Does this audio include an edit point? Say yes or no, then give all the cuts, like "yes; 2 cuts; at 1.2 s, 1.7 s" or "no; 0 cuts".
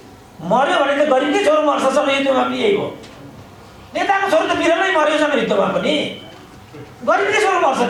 no; 0 cuts